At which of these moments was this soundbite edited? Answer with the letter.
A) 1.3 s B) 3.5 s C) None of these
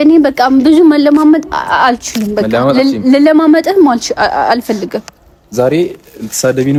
C